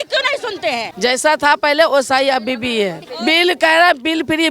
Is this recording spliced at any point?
yes; 2 cuts; at 0.9 s, 3.0 s

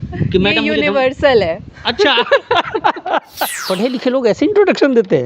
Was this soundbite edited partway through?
yes; 1 cut; at 3.6 s

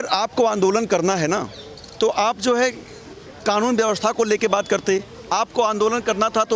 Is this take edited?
no; 0 cuts

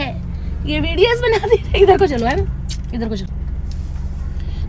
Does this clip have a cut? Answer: no; 0 cuts

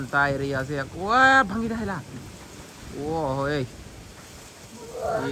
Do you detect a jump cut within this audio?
no; 0 cuts

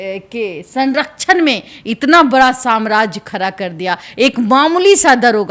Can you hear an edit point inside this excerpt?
no; 0 cuts

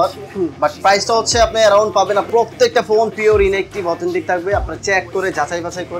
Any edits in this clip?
yes; 1 cut; at 2.3 s

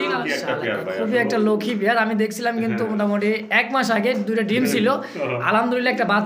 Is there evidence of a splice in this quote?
no; 0 cuts

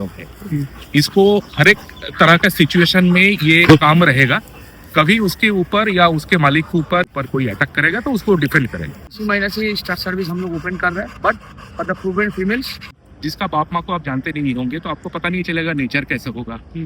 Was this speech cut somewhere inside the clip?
yes; 3 cuts; at 7.1 s, 9.0 s, 12.9 s

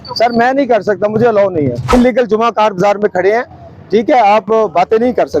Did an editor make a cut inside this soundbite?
yes; 1 cut; at 1.9 s

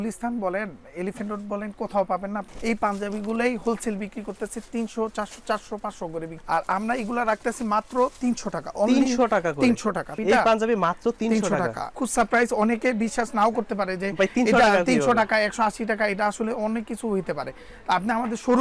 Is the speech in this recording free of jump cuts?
no; 4 cuts; at 2.5 s, 6.4 s, 10.1 s, 11.9 s

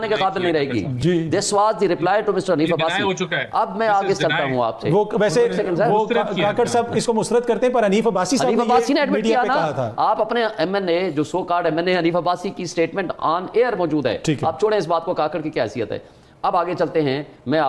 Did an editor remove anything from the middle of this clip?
no; 0 cuts

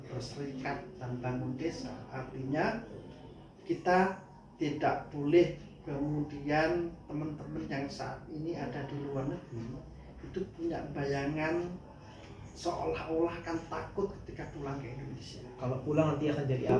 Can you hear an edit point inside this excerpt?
no; 0 cuts

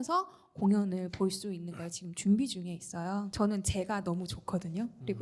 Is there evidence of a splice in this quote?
yes; 1 cut; at 3.3 s

